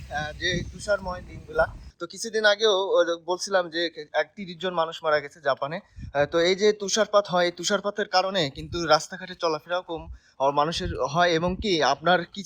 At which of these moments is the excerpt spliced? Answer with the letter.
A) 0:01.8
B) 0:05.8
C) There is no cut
A